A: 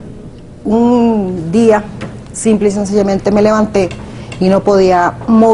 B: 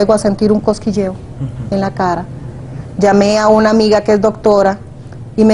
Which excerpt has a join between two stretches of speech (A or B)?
A